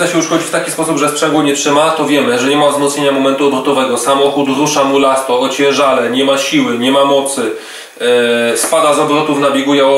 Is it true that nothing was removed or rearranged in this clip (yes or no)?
yes